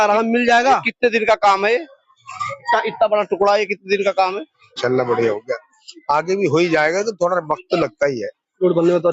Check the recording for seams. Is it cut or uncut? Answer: cut